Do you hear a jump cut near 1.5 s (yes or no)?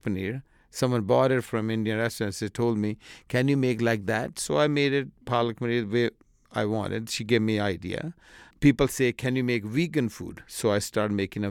yes